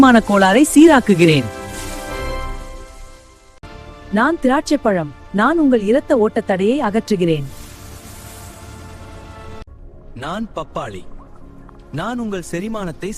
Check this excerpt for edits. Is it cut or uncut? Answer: cut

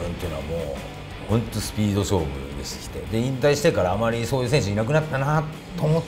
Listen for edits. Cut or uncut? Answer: uncut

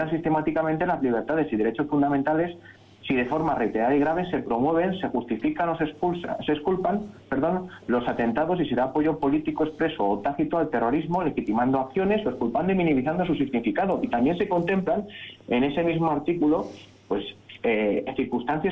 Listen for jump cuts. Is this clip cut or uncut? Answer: cut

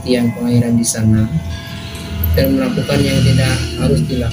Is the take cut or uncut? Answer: uncut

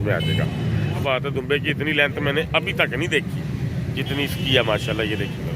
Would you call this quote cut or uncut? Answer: cut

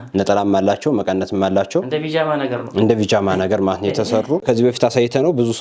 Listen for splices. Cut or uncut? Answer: cut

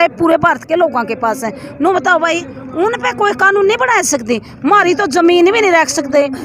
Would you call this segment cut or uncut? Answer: uncut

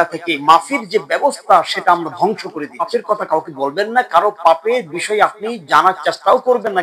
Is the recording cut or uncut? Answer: cut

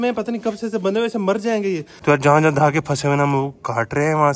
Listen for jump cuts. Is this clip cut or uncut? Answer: cut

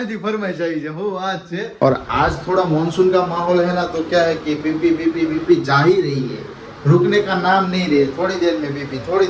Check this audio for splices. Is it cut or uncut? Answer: cut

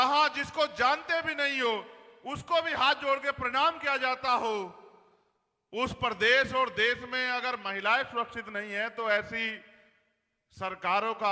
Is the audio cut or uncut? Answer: uncut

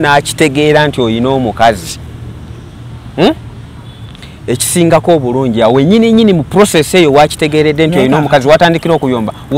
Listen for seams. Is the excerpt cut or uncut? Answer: uncut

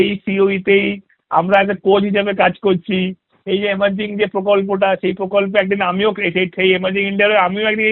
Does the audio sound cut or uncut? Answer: uncut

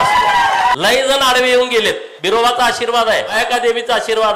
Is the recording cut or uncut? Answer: cut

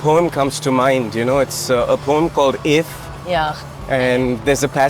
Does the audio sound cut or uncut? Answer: uncut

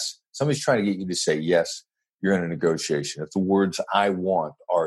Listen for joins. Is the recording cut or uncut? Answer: uncut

